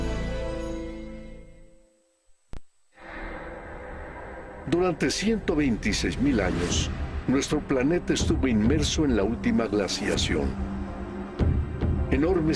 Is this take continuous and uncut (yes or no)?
yes